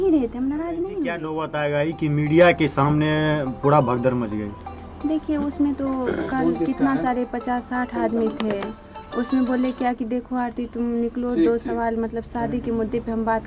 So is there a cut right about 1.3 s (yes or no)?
yes